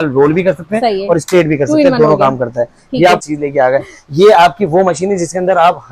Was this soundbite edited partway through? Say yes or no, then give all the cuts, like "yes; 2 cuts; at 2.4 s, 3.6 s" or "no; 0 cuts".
yes; 1 cut; at 3.2 s